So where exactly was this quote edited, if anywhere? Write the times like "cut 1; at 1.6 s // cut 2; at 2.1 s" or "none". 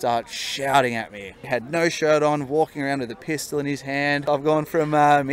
cut 1; at 1.4 s // cut 2; at 4.2 s